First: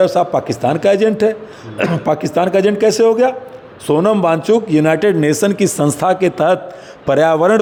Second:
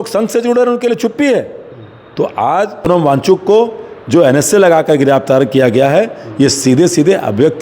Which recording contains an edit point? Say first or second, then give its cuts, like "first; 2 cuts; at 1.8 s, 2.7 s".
second; 1 cut; at 2.9 s